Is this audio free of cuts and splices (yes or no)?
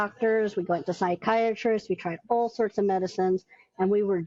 yes